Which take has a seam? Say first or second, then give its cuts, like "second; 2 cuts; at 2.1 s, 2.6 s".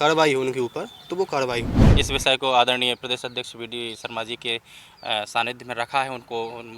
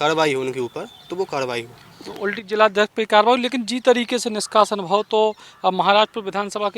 first; 1 cut; at 1.8 s